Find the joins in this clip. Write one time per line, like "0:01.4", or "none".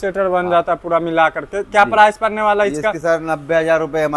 none